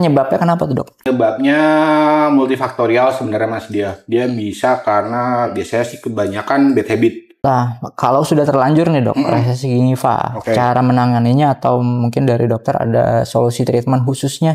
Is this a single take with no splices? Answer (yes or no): no